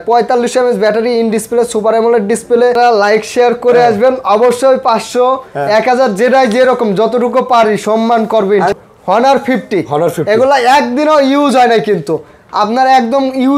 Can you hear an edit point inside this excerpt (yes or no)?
yes